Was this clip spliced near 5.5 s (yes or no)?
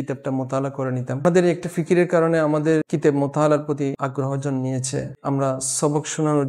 no